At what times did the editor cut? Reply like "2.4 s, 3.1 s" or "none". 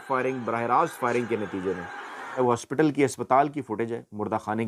none